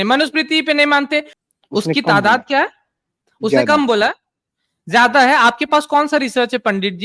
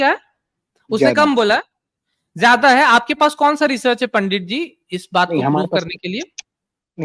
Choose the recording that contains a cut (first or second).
first